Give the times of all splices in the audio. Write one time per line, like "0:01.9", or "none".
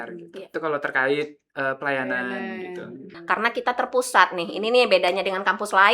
0:03.1

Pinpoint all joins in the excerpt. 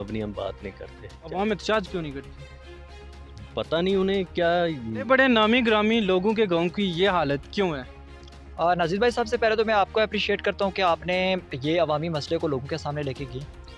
0:01.3
0:04.9

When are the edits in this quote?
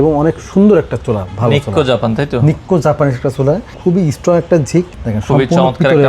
0:03.7
0:04.9

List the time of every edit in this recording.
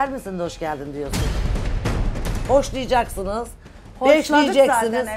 none

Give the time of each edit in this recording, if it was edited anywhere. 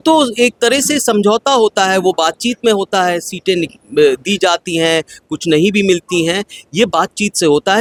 none

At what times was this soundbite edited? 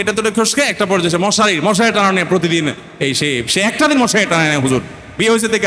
none

